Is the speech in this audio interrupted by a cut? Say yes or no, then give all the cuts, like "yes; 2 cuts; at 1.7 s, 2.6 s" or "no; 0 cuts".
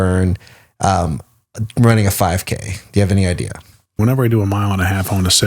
yes; 1 cut; at 4.0 s